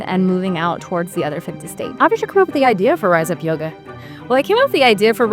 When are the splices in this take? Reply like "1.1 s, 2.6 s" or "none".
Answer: 1.9 s